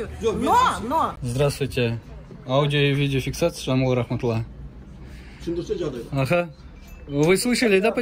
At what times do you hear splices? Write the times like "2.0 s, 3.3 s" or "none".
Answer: 1.2 s